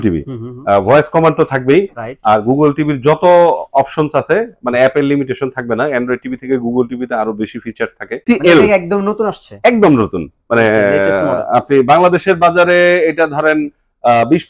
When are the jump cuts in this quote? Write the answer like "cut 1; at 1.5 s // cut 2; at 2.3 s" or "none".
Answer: cut 1; at 8.2 s